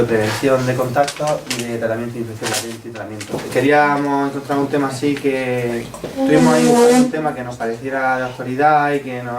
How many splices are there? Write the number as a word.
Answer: zero